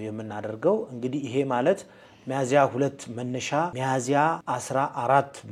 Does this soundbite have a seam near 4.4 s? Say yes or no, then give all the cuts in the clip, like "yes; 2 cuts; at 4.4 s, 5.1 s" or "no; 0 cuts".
yes; 2 cuts; at 3.8 s, 4.4 s